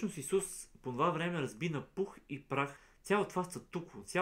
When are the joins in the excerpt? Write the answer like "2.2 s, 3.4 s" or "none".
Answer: 2.9 s